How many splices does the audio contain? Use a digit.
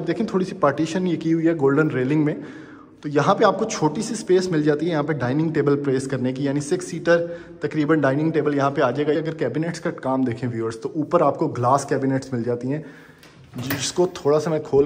1